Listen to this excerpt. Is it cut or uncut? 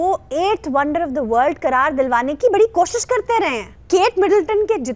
cut